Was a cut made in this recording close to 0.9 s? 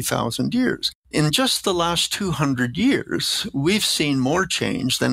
yes; 1 cut; at 0.9 s

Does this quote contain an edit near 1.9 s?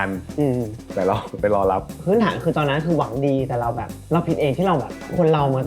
yes; 1 cut; at 1.9 s

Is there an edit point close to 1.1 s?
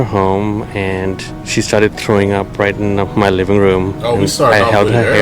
yes; 1 cut; at 1.1 s

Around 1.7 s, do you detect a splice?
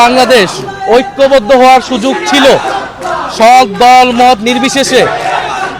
no; 0 cuts

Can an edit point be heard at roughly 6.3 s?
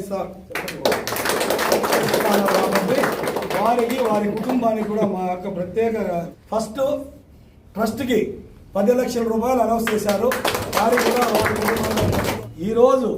yes; 2 cuts; at 6.3 s, 12.4 s

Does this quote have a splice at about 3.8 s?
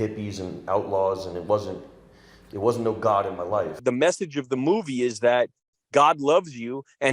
yes; 1 cut; at 3.8 s

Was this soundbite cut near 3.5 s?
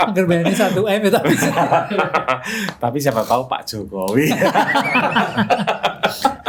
no; 0 cuts

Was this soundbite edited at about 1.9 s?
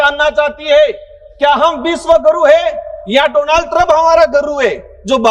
no; 0 cuts

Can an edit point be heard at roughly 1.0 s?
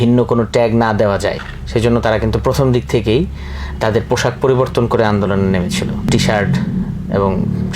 no; 1 cut; at 6.1 s

